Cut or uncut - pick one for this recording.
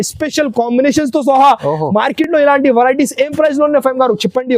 uncut